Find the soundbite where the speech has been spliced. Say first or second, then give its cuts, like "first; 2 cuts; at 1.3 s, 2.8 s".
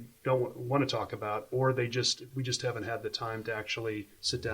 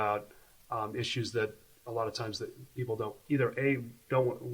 first; 1 cut; at 2.2 s